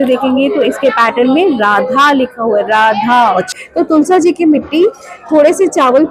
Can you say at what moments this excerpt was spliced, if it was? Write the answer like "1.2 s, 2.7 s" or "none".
3.5 s